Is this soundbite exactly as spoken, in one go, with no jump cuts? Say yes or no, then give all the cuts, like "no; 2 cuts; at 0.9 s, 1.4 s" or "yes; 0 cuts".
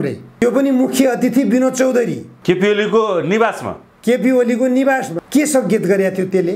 yes; 0 cuts